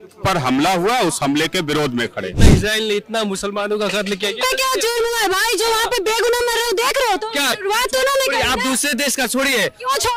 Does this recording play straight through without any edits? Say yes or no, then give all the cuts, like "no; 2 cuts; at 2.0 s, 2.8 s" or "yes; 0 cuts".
no; 2 cuts; at 2.4 s, 7.6 s